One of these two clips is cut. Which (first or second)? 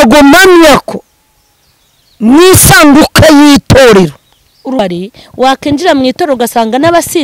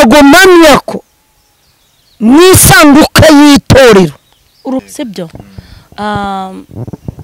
first